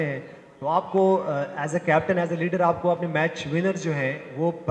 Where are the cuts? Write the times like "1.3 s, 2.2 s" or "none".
none